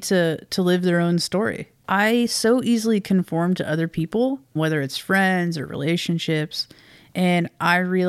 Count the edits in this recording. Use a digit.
2